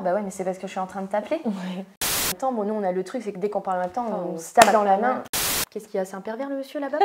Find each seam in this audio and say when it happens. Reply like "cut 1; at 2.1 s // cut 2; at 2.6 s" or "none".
cut 1; at 2.0 s // cut 2; at 5.4 s